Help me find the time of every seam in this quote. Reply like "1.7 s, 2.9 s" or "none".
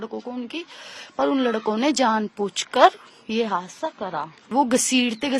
4.5 s